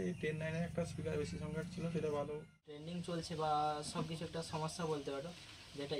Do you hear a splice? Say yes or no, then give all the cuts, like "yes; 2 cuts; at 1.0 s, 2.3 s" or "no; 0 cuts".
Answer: yes; 1 cut; at 2.8 s